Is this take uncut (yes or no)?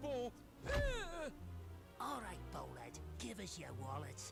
yes